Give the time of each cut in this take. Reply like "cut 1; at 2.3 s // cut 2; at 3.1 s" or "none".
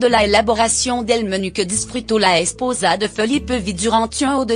cut 1; at 2.3 s